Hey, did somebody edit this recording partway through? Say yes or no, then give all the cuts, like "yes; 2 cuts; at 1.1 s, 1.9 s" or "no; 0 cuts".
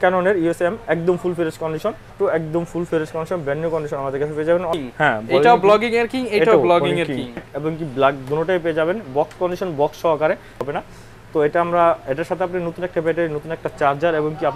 yes; 4 cuts; at 2.1 s, 4.8 s, 7.4 s, 10.6 s